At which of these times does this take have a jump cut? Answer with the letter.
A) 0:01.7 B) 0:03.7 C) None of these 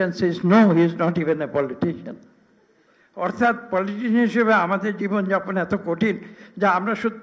C